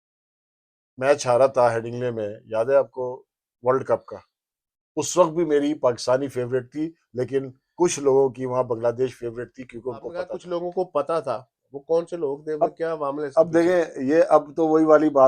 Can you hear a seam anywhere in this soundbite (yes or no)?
yes